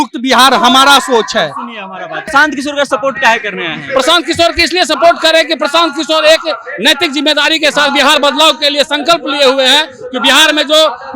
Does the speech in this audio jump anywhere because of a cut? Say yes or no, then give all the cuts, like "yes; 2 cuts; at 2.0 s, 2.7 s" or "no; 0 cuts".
yes; 1 cut; at 2.2 s